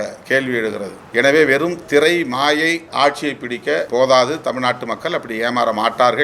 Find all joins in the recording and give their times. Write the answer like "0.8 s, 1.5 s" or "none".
0.9 s, 2.9 s, 3.9 s